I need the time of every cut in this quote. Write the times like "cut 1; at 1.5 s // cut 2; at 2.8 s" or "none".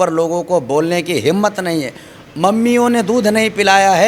none